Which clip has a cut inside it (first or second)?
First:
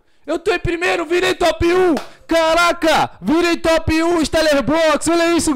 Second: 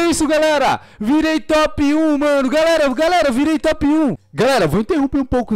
second